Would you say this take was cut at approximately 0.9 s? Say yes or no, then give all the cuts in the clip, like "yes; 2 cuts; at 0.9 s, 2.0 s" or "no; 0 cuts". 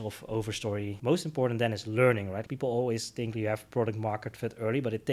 yes; 2 cuts; at 0.9 s, 2.4 s